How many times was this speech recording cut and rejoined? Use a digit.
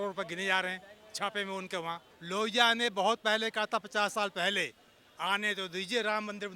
1